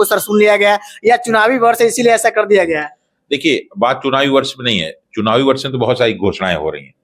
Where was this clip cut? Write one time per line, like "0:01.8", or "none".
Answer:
none